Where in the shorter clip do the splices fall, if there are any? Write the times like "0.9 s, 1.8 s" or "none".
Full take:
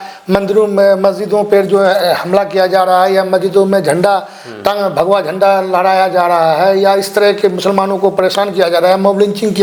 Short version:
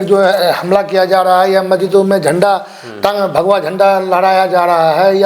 none

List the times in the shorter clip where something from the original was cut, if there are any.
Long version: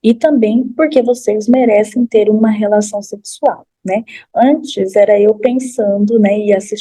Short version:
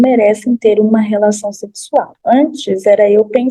2.1 s

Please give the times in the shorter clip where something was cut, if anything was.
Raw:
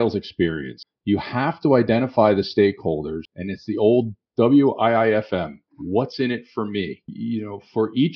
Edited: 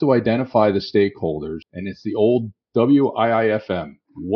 none

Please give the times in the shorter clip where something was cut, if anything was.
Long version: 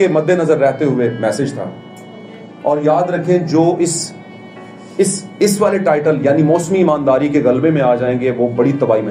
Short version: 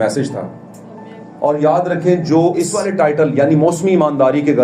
2.8 s

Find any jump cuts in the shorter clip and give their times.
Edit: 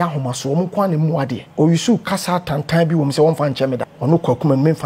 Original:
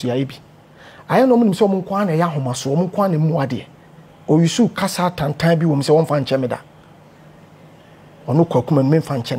1.4 s, 3.9 s

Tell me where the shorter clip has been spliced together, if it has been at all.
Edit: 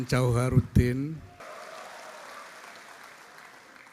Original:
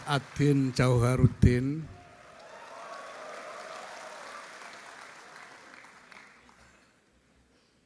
1.4 s

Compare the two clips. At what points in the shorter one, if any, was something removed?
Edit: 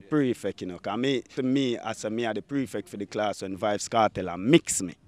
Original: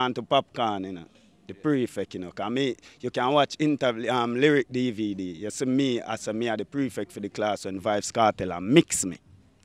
1.3 s

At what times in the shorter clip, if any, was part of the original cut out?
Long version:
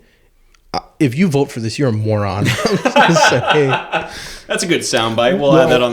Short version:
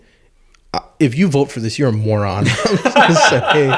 none

